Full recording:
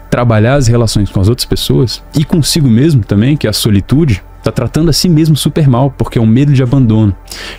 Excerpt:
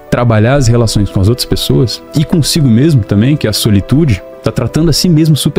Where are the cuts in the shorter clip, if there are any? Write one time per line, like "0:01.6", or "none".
none